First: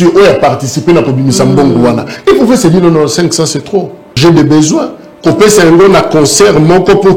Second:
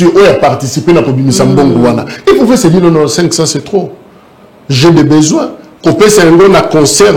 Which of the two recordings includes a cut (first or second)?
first